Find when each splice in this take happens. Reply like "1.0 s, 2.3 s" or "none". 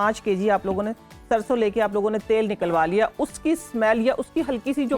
none